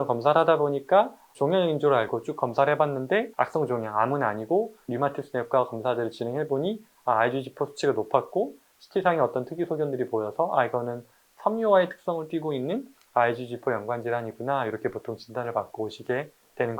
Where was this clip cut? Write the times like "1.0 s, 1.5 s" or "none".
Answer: 3.3 s